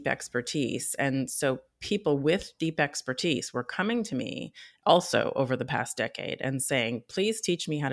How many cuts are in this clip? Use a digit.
0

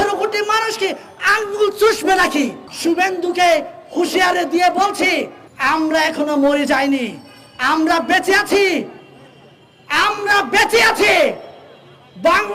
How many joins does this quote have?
1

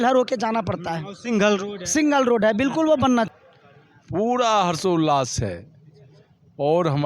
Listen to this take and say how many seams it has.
1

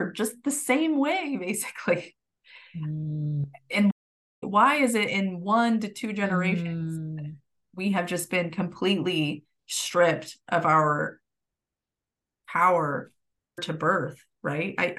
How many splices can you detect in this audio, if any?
0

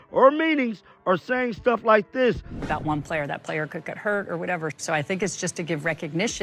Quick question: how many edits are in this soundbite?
1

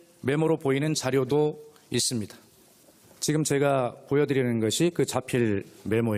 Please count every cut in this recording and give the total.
1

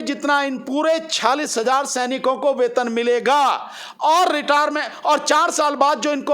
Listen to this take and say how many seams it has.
1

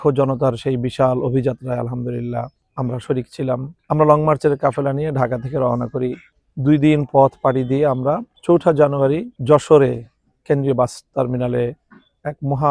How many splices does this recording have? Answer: 2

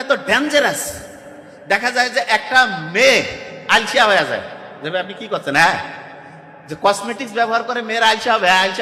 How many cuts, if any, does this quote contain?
0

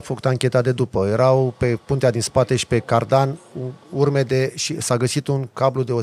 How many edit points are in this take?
0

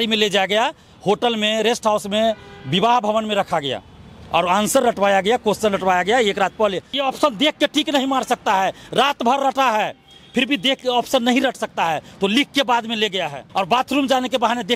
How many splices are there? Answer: 2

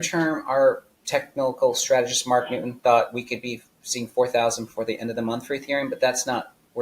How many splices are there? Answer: 1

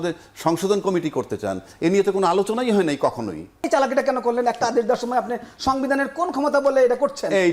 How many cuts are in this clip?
1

